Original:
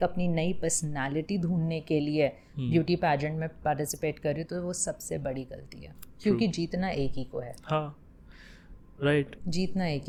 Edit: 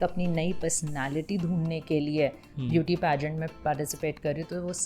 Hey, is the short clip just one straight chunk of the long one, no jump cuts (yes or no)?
yes